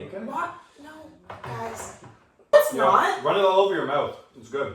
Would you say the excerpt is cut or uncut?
cut